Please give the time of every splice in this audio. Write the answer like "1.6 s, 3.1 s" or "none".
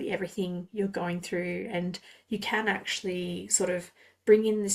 none